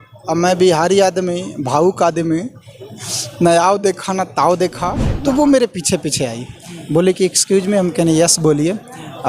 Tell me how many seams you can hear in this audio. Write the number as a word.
one